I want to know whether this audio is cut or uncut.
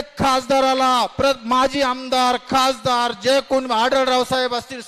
uncut